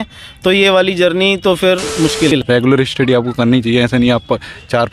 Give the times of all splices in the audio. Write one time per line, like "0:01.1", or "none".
0:02.4